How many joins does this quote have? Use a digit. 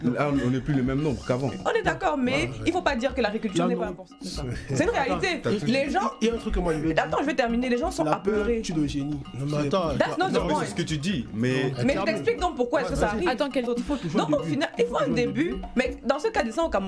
2